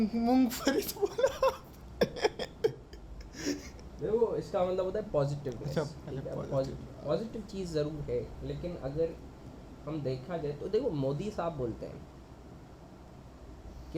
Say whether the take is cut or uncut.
uncut